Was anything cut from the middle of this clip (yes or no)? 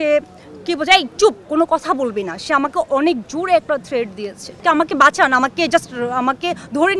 yes